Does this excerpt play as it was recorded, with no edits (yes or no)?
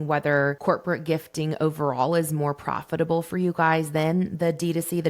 yes